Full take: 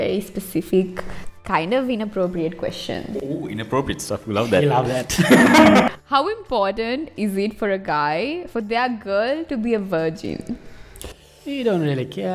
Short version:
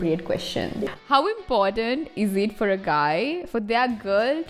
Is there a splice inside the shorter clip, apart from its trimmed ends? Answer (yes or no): yes